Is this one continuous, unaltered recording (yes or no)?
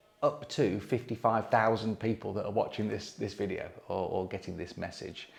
yes